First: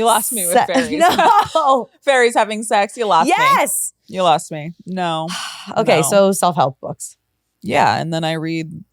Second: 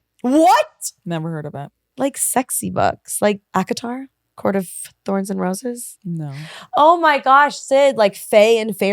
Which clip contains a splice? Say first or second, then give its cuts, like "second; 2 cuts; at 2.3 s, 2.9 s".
second; 2 cuts; at 1.8 s, 3.4 s